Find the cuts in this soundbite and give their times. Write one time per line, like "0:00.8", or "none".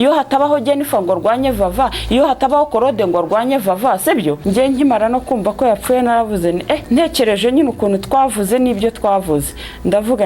0:04.4
0:06.8